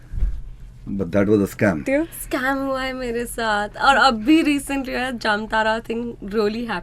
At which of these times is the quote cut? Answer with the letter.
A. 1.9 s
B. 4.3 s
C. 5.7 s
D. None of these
A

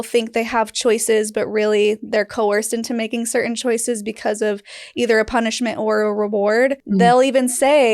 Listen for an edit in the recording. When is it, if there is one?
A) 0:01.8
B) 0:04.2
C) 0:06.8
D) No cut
C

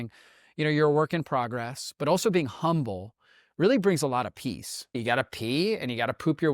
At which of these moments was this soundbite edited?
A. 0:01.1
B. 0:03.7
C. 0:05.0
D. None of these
C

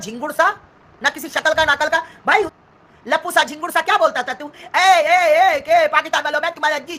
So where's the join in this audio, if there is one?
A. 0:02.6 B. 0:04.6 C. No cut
A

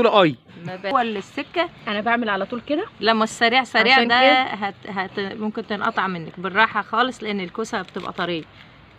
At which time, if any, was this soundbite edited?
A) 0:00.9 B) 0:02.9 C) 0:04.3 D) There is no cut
A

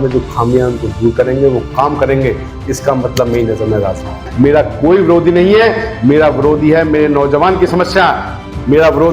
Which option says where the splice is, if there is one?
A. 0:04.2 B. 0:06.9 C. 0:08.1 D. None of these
A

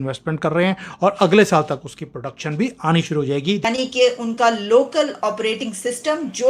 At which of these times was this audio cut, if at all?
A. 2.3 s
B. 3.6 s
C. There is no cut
B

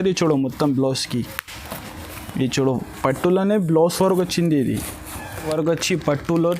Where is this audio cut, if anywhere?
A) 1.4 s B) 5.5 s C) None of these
B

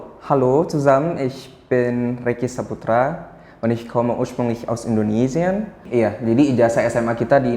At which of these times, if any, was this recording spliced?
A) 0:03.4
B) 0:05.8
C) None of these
B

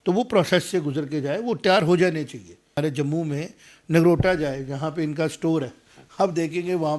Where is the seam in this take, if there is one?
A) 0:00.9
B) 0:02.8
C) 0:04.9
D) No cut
B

